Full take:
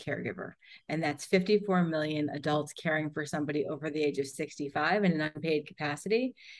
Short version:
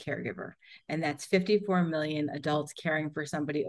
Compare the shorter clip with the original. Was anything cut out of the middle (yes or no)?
no